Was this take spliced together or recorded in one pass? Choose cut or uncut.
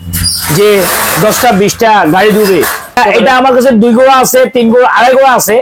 cut